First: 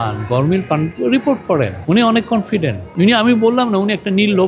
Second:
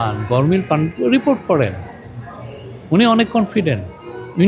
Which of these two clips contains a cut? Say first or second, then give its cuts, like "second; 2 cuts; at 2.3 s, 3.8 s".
first; 2 cuts; at 1.8 s, 2.8 s